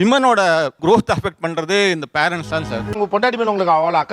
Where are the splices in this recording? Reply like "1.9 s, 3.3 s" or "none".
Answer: 2.9 s